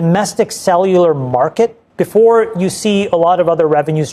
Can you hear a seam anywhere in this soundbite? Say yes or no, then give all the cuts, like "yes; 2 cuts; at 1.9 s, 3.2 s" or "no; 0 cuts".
yes; 1 cut; at 1.9 s